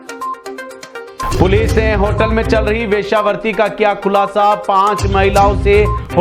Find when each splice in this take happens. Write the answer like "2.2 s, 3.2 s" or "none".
1.0 s